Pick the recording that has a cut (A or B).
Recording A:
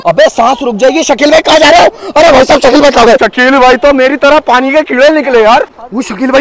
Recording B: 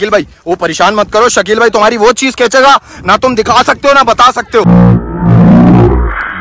B